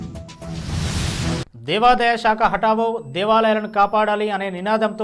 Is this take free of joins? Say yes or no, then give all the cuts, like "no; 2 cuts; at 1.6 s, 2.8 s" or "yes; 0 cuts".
no; 1 cut; at 1.4 s